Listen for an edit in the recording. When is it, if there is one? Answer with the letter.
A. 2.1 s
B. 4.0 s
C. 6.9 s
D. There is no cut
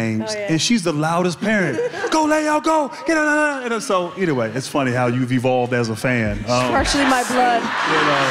D